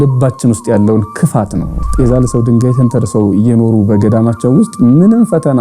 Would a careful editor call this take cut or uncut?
cut